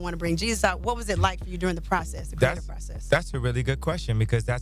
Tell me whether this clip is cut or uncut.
uncut